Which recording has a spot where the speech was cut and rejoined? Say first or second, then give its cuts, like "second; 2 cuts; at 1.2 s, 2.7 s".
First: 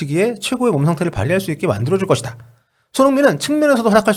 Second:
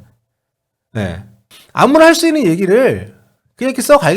second; 1 cut; at 1.5 s